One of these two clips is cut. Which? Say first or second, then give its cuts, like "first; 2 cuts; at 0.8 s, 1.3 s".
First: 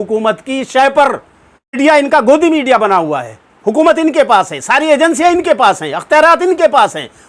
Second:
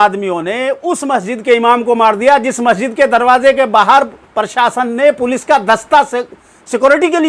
first; 1 cut; at 1.8 s